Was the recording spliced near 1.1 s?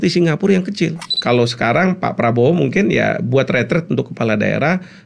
yes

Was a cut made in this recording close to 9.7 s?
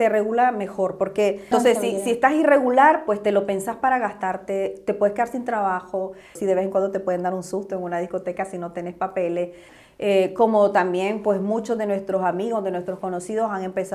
yes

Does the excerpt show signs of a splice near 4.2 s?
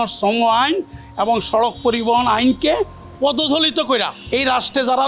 yes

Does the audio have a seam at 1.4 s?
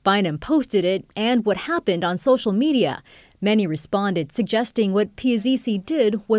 no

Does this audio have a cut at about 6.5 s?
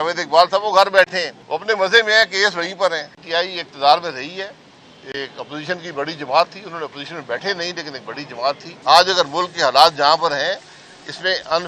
no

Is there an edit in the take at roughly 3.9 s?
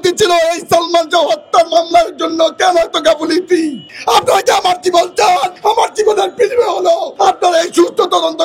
yes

